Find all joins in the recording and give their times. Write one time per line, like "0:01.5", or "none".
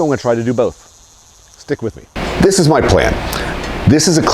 0:02.1